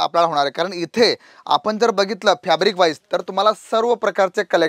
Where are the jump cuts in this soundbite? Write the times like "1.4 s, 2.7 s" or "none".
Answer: none